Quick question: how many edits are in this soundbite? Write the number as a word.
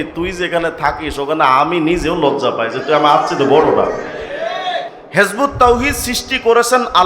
one